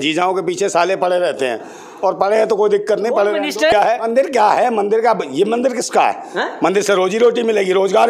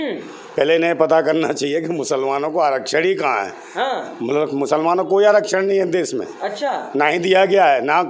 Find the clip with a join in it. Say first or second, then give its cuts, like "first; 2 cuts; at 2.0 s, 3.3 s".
first; 1 cut; at 3.7 s